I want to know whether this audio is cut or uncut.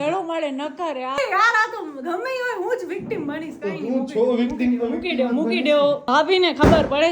cut